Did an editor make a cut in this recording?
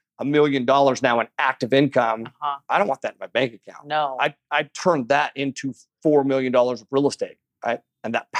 no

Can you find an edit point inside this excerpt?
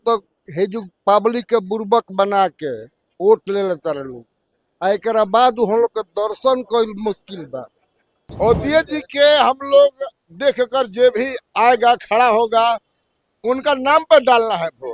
yes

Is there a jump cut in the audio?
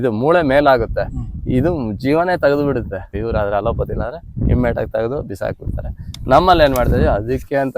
yes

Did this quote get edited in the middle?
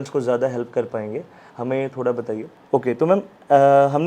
yes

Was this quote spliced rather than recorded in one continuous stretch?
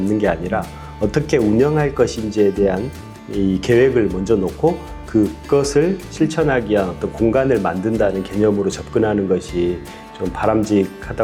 no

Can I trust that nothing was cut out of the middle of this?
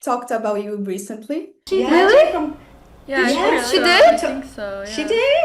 no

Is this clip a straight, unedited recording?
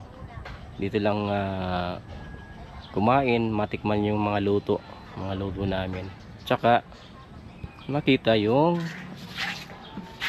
yes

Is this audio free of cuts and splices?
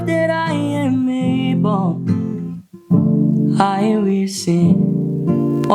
yes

